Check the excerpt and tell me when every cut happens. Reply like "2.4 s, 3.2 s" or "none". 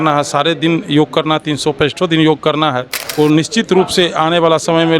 3.0 s